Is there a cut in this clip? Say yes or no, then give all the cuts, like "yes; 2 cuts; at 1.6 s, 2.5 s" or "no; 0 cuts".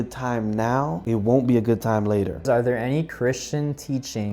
yes; 2 cuts; at 1.0 s, 2.4 s